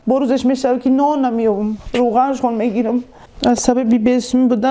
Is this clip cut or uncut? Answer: cut